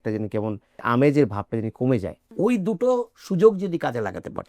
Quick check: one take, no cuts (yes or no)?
no